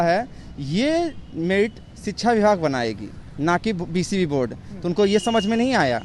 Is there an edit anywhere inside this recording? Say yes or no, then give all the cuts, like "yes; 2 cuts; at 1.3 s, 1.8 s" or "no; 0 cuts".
no; 0 cuts